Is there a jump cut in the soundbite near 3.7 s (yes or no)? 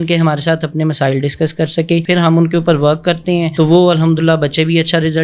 no